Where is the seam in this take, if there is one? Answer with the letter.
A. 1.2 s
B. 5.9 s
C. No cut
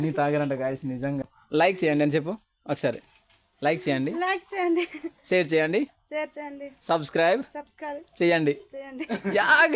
A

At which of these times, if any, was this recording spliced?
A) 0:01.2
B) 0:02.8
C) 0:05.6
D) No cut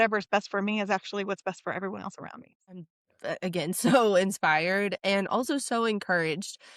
B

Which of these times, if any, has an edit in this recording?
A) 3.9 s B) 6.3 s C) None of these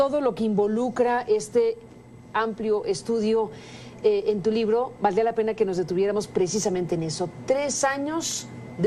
B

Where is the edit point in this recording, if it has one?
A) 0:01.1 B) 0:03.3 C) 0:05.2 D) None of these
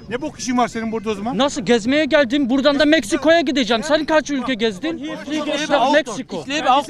C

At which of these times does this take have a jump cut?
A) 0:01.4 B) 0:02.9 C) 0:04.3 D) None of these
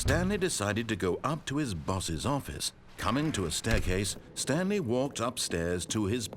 B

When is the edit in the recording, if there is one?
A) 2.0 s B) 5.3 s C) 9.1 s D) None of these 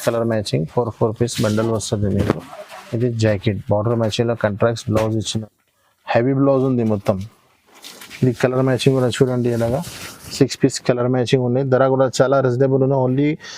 B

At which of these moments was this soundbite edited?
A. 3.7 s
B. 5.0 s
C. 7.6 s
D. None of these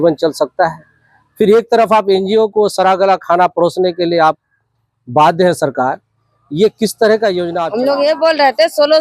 C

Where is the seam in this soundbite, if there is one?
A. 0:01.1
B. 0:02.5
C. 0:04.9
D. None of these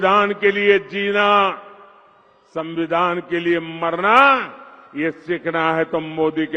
D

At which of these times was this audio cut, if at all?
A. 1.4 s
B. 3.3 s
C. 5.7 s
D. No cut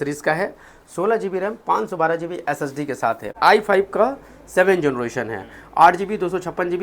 B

